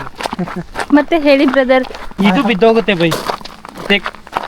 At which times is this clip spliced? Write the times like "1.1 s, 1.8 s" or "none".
2.2 s